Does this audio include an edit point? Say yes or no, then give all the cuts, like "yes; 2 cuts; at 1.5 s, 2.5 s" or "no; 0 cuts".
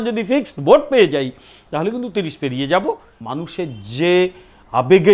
yes; 1 cut; at 3.1 s